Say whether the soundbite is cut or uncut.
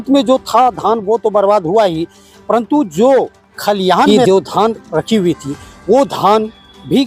cut